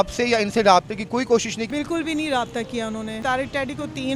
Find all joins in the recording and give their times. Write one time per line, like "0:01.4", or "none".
0:01.6
0:03.2